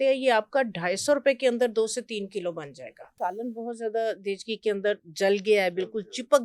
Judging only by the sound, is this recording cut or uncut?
cut